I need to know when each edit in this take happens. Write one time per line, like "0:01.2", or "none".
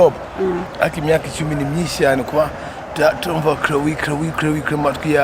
none